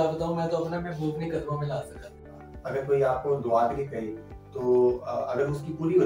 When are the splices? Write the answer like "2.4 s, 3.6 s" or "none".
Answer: 2.2 s